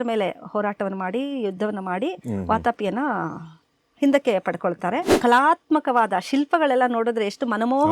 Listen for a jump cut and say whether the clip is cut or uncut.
cut